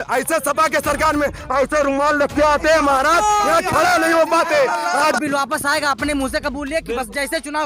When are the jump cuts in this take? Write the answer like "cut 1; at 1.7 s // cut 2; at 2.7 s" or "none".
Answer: cut 1; at 5.2 s